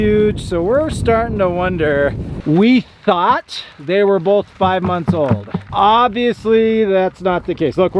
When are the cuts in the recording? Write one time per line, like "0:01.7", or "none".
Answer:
0:02.3
0:05.6

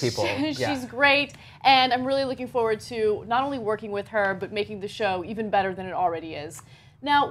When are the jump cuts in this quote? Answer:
0:04.8

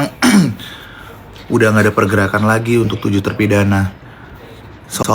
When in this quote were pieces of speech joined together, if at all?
none

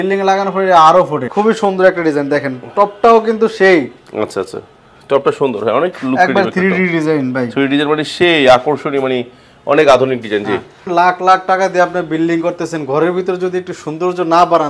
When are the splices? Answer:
0:01.2
0:10.9

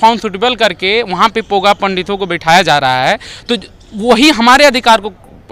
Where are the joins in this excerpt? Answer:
none

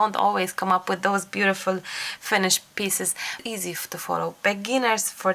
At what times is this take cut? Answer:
0:03.4

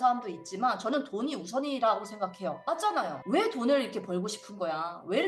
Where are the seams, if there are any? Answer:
0:03.2

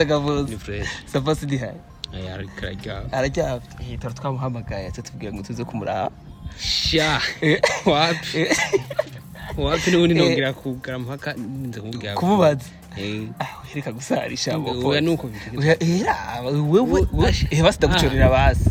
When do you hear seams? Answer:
none

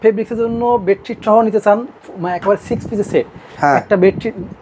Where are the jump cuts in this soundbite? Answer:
none

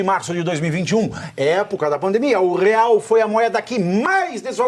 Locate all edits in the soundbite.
none

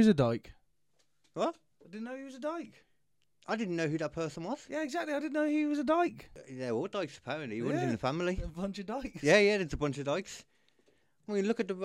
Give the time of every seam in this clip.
0:06.3

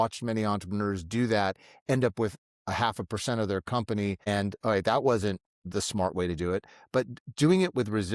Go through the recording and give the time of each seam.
0:04.3
0:05.5

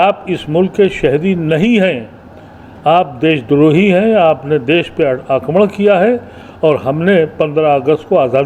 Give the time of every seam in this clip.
none

